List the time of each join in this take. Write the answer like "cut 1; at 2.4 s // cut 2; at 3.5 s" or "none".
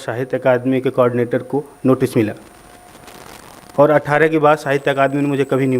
none

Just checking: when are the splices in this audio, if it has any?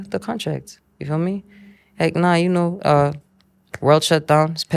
none

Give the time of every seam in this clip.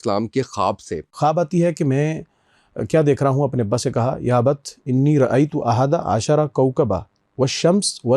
cut 1; at 1.1 s

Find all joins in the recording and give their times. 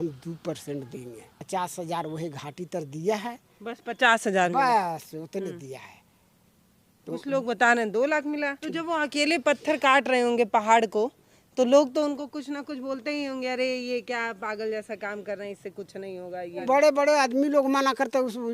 cut 1; at 1.5 s // cut 2; at 8.6 s // cut 3; at 16.6 s

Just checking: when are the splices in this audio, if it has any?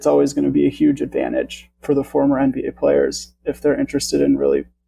none

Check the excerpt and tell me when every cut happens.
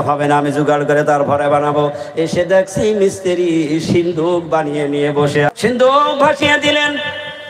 cut 1; at 5.4 s

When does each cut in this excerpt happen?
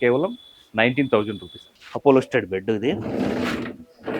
cut 1; at 1.7 s

